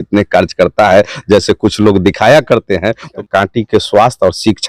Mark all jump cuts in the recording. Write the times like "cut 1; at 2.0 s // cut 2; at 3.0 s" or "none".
cut 1; at 3.2 s